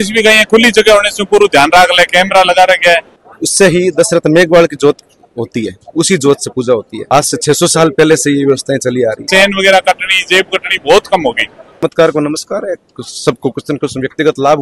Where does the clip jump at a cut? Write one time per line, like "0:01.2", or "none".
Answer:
0:03.2
0:09.3
0:11.8